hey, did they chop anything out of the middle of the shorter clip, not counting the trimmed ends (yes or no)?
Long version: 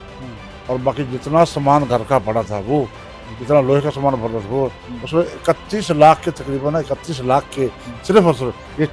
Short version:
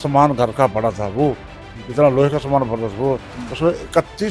no